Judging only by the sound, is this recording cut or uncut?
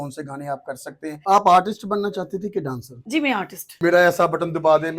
cut